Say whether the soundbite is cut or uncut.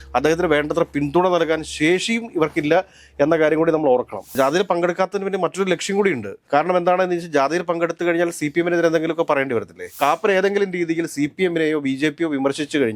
cut